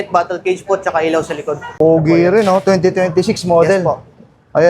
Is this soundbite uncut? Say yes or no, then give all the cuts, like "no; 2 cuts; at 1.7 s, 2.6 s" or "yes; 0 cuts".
no; 1 cut; at 1.8 s